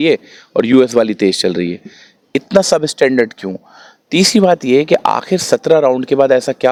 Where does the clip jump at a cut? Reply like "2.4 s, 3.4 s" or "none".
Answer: none